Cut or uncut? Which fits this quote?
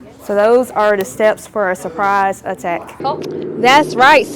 cut